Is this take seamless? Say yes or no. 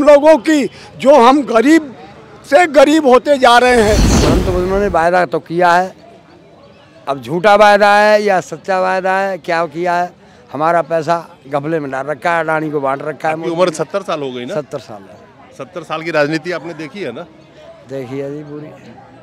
no